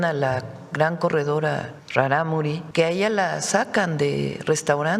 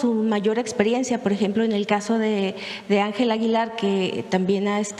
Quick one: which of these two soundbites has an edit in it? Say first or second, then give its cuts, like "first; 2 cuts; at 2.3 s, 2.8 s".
first; 2 cuts; at 1.8 s, 2.6 s